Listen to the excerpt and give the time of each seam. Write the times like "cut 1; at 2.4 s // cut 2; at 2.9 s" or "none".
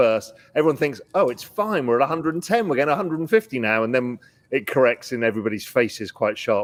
none